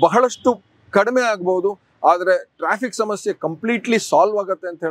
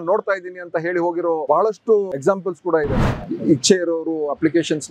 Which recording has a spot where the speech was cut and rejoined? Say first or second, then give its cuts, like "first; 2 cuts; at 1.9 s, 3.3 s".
second; 2 cuts; at 1.4 s, 3.0 s